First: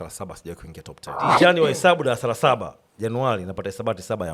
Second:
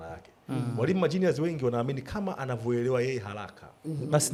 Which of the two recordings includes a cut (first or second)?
first